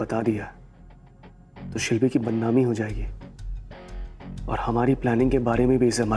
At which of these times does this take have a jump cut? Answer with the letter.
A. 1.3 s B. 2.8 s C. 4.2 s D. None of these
D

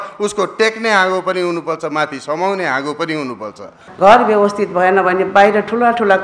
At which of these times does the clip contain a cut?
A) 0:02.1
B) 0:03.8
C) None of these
B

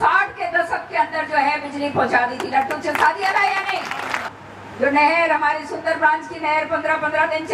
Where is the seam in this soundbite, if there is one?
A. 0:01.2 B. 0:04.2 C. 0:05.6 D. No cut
B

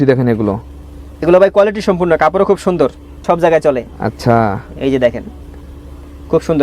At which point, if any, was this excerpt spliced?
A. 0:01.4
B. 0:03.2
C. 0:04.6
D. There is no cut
B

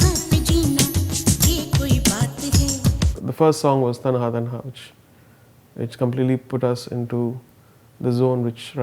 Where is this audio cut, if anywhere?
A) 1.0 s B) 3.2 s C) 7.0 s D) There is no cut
B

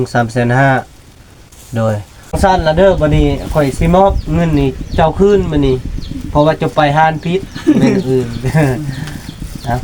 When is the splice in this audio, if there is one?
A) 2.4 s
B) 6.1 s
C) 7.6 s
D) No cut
A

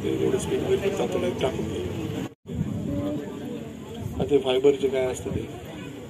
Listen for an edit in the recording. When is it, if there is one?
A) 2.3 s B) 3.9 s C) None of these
A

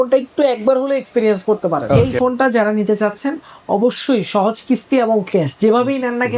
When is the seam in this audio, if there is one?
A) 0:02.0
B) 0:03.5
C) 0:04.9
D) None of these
A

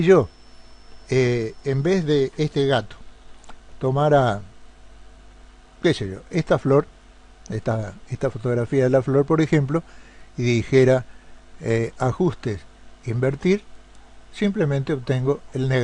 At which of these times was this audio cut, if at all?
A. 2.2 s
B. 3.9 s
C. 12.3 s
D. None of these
C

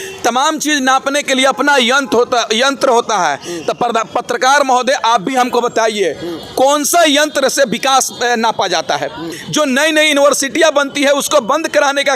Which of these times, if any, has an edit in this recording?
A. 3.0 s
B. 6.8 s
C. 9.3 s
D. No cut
C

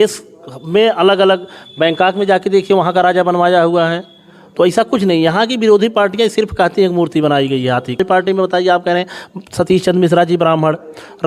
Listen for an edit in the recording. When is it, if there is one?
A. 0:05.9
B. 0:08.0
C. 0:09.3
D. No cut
B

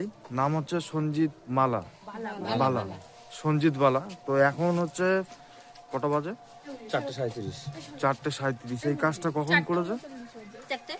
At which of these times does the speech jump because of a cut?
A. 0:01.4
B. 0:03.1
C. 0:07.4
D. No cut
A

